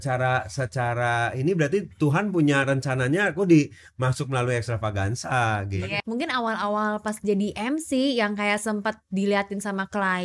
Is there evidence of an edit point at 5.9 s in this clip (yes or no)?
yes